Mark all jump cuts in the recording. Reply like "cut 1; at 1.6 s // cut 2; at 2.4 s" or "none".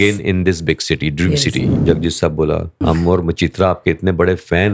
cut 1; at 1.7 s // cut 2; at 2.8 s